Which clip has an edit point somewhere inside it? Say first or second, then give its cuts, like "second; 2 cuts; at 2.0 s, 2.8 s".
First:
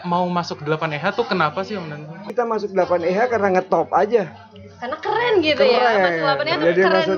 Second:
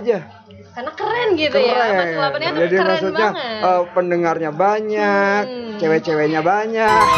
first; 1 cut; at 2.2 s